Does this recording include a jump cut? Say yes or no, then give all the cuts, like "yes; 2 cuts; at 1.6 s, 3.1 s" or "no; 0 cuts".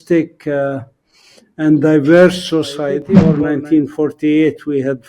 yes; 1 cut; at 3.1 s